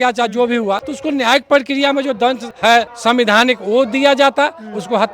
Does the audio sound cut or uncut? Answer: cut